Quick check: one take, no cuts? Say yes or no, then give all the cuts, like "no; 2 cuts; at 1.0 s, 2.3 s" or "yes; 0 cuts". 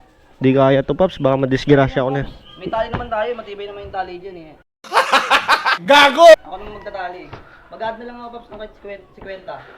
yes; 0 cuts